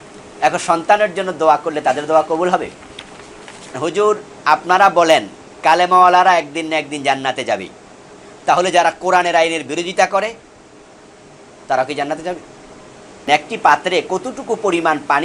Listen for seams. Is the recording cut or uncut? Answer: cut